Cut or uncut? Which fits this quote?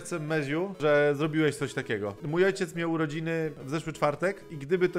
cut